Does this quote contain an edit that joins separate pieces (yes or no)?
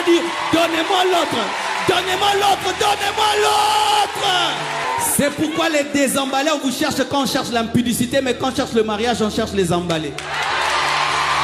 yes